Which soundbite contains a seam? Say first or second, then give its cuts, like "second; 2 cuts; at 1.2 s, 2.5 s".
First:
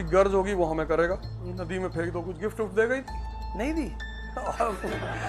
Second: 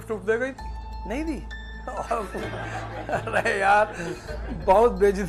first; 1 cut; at 1.4 s